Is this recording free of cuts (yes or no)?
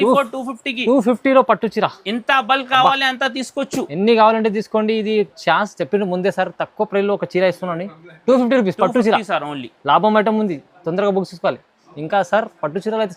yes